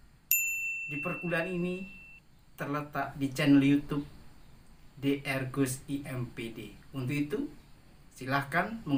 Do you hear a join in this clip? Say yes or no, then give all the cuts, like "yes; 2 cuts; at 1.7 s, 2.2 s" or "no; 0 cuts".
no; 0 cuts